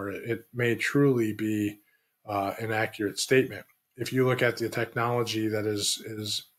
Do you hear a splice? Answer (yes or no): no